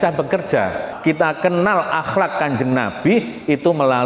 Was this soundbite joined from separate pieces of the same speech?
yes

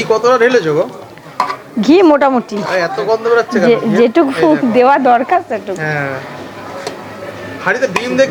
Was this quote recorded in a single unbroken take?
yes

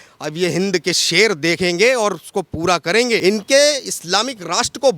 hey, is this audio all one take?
no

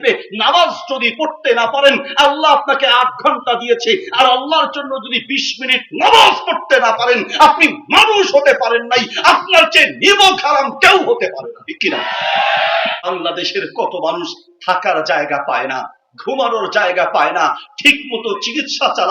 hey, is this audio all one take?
no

